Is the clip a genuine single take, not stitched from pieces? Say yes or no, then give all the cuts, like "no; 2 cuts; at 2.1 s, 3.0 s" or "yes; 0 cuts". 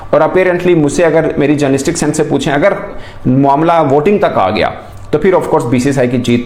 yes; 0 cuts